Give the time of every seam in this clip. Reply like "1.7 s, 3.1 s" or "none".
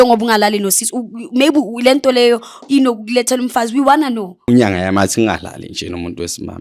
4.4 s